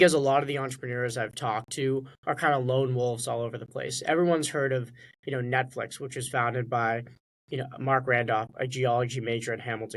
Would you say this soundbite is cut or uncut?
uncut